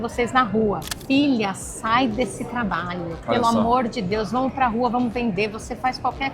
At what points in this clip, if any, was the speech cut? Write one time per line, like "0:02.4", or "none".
0:00.9

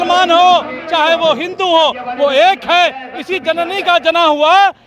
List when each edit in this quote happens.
none

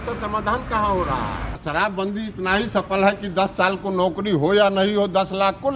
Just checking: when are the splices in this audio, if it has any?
0:01.6

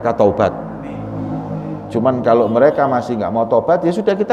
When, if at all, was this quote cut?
none

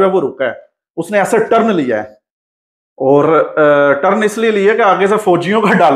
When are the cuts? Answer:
none

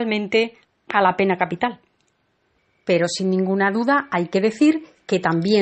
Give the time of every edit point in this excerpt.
none

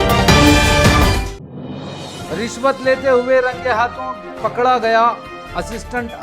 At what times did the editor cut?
0:01.1
0:02.3

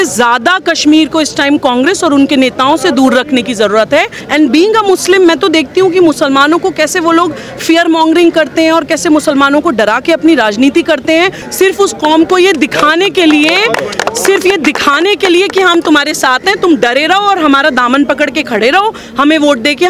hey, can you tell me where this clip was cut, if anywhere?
0:04.2
0:11.4

